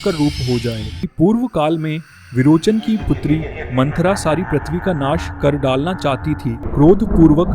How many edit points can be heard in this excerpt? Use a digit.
2